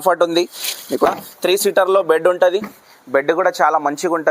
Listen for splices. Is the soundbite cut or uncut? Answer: cut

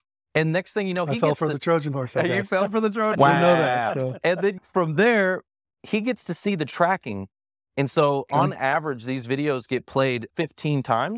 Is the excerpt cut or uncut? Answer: cut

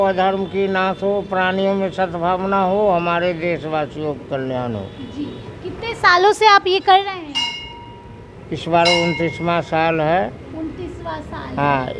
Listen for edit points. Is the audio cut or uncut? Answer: uncut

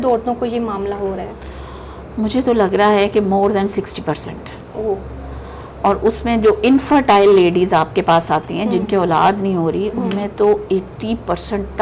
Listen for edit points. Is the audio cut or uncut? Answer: uncut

